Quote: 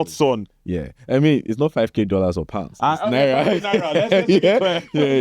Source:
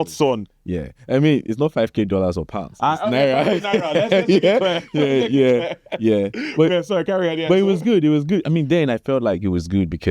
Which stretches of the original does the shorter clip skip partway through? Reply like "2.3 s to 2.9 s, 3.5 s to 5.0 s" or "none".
none